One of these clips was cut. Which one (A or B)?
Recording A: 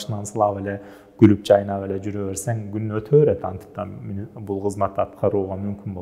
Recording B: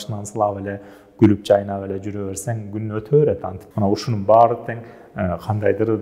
B